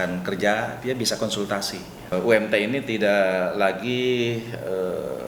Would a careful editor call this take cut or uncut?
cut